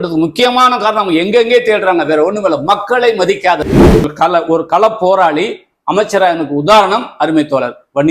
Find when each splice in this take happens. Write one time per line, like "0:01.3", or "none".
0:04.1